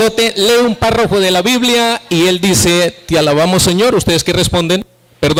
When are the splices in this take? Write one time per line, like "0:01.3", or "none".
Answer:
none